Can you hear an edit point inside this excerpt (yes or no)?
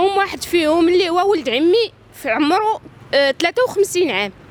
no